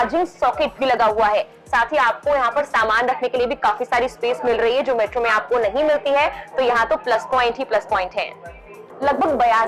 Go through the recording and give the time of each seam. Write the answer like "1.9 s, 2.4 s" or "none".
none